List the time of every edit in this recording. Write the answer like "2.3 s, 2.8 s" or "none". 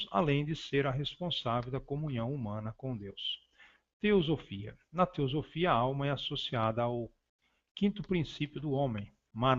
none